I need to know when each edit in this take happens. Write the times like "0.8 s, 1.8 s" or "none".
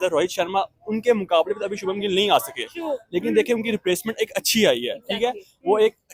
none